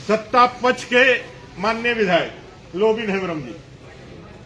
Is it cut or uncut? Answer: uncut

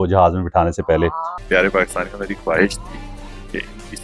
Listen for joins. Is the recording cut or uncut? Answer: cut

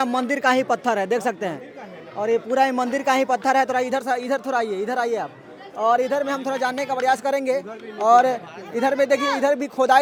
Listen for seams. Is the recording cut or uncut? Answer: uncut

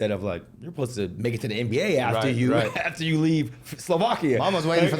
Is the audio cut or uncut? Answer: uncut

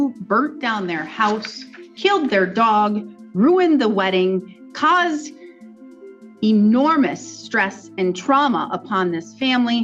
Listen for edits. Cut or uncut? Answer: uncut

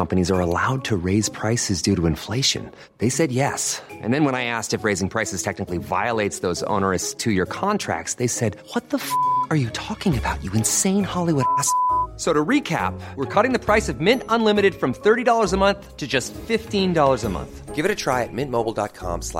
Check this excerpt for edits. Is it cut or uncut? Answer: uncut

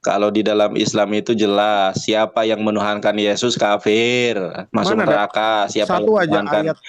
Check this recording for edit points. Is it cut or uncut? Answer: uncut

